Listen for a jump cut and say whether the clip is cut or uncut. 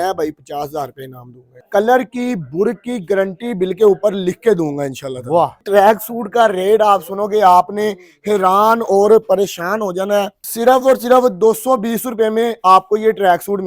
cut